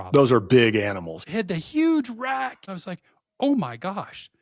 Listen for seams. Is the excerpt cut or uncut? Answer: cut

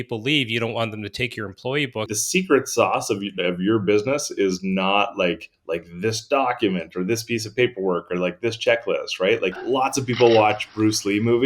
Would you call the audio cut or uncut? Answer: cut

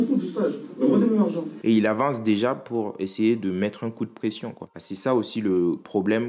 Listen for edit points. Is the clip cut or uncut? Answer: cut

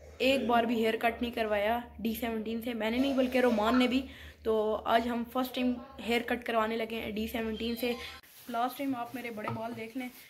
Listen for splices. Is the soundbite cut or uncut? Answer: cut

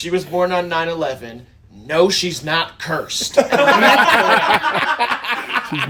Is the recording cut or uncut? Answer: uncut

